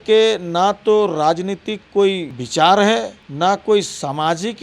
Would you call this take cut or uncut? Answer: cut